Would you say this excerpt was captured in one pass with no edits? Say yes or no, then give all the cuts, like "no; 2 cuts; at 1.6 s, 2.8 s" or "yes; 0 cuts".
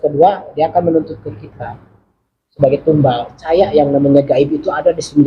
no; 1 cut; at 3.4 s